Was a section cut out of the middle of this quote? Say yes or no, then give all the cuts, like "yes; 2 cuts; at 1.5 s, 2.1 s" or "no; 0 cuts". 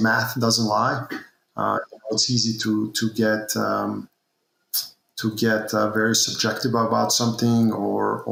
no; 0 cuts